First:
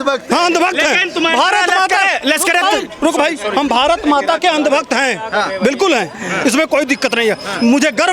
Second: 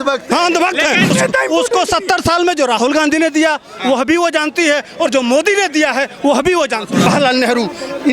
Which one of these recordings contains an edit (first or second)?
second